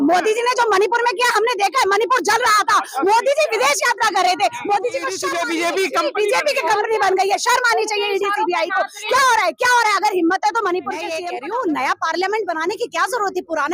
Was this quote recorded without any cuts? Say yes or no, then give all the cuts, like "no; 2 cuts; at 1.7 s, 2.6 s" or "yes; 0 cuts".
no; 2 cuts; at 5.2 s, 11.2 s